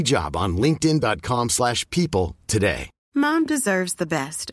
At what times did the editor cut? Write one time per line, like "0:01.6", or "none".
0:02.9